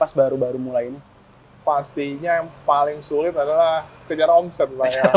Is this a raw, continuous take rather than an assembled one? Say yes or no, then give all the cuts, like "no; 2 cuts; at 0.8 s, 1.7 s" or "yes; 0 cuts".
yes; 0 cuts